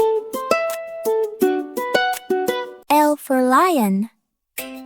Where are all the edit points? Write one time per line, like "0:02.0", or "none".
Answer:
0:02.8